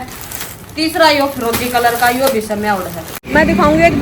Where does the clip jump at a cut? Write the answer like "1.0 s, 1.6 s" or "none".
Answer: 3.1 s

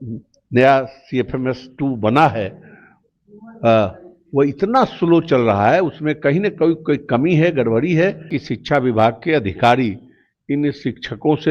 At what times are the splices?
8.3 s

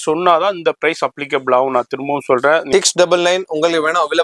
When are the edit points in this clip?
2.7 s

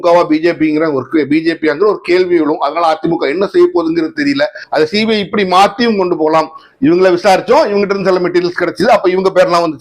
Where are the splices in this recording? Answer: 4.6 s

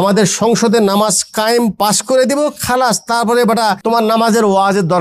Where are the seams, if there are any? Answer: 3.8 s

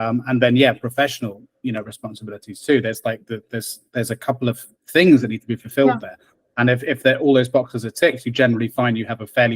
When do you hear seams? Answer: none

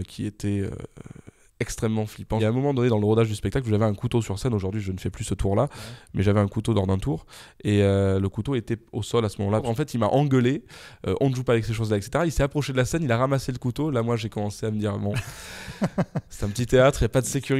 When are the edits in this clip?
2.4 s, 9.6 s

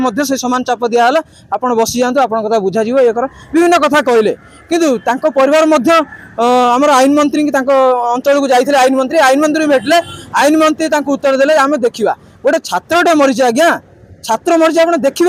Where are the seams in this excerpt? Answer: none

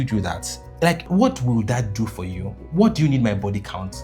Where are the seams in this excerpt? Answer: 1.1 s

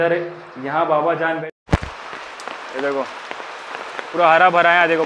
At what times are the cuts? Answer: 1.5 s

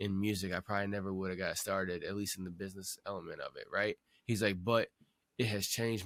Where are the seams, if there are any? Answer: none

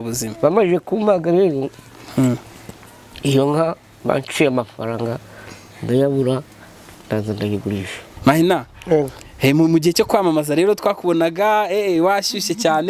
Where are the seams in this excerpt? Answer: 8.1 s

